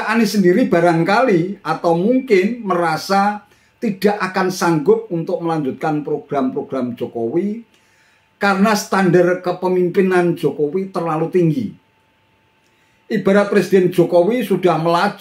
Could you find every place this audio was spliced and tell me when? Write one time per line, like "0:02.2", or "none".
none